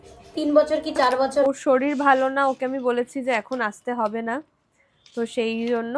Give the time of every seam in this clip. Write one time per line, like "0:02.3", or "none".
0:01.4